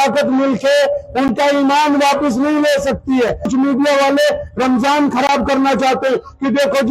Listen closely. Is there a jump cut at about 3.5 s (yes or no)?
yes